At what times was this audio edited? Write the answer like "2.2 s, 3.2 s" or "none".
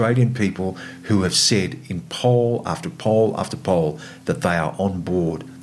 none